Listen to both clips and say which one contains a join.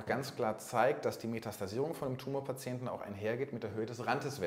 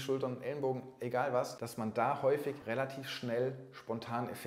second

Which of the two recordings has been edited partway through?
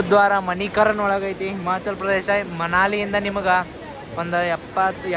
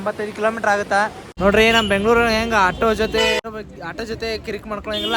second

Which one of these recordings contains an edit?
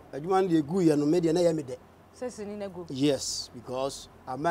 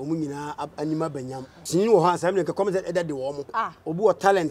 second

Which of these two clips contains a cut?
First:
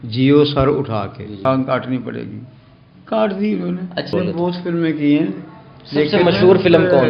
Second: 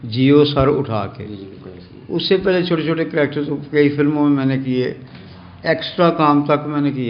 first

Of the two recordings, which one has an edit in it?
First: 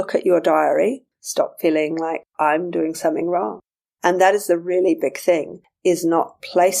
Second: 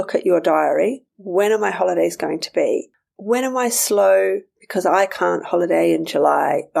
first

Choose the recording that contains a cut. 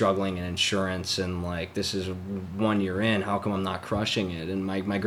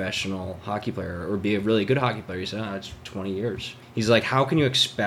second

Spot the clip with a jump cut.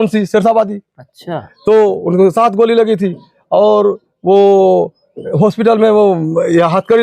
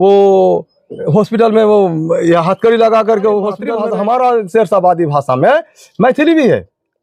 second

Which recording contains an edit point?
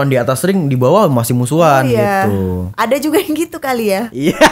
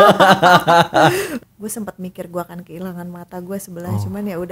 second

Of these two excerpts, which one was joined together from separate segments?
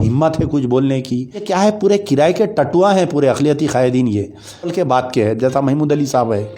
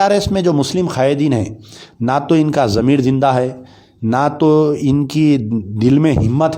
first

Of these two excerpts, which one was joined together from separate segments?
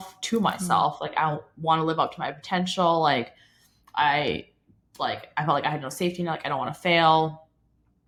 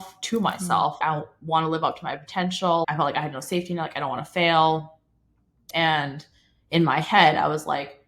second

